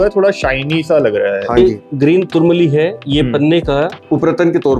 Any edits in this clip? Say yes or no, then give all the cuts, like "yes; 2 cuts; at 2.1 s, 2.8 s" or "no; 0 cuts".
yes; 2 cuts; at 1.6 s, 4.0 s